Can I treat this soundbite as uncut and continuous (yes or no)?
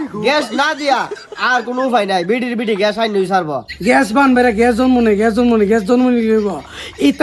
no